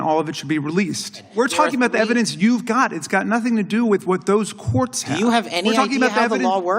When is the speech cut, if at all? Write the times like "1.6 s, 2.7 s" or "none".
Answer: 1.3 s

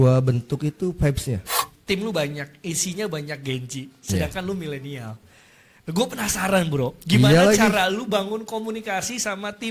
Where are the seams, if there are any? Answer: 1.7 s

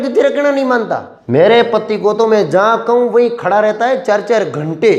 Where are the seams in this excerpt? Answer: 1.1 s

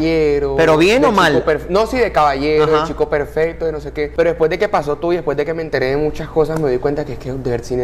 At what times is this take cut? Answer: none

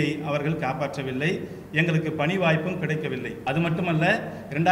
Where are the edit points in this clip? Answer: 3.3 s

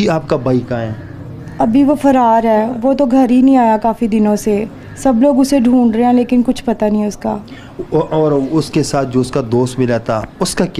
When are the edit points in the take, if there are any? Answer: none

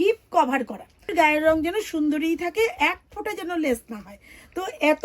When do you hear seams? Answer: 1.1 s

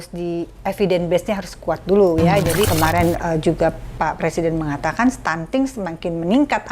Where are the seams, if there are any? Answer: 2.7 s

